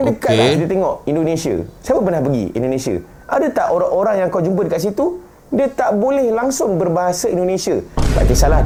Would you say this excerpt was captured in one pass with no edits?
yes; 0 cuts

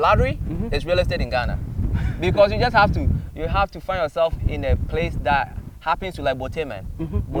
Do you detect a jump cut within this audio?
no; 0 cuts

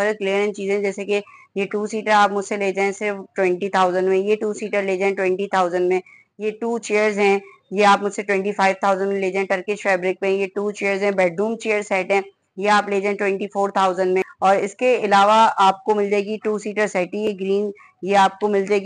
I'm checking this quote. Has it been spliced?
yes; 1 cut; at 14.3 s

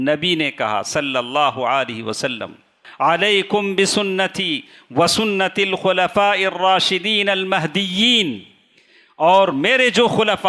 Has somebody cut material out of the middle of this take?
yes; 1 cut; at 2.8 s

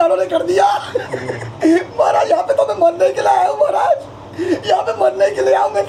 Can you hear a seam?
no; 0 cuts

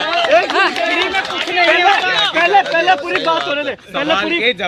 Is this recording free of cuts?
yes; 0 cuts

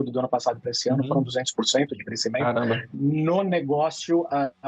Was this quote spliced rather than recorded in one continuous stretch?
no; 0 cuts

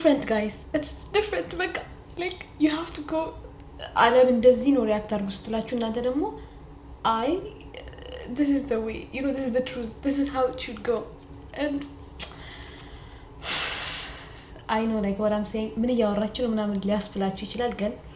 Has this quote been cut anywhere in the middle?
no; 0 cuts

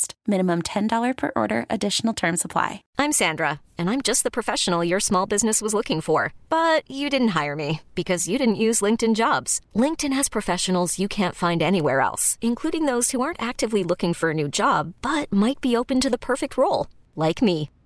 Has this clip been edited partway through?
yes; 1 cut; at 2.8 s

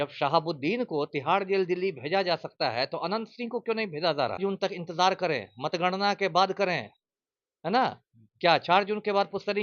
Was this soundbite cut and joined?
yes; 1 cut; at 4.4 s

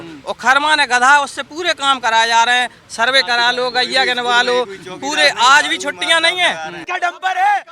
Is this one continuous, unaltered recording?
no; 1 cut; at 6.8 s

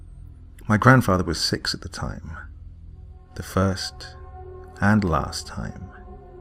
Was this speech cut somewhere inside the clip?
no; 0 cuts

